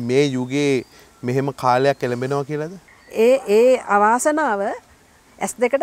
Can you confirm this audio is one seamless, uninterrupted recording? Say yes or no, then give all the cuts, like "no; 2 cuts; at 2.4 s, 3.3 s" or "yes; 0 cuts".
no; 1 cut; at 2.8 s